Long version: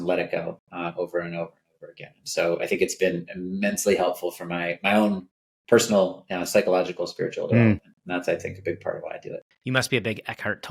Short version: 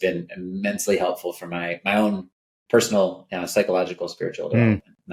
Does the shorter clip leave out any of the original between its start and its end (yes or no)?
no